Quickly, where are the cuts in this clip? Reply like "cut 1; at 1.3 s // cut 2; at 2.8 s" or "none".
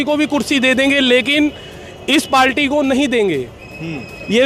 none